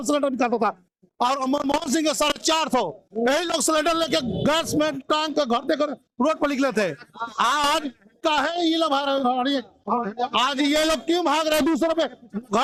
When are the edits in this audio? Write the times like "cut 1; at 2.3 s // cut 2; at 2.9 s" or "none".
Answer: none